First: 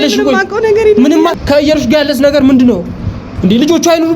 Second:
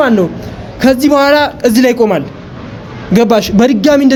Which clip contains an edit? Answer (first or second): first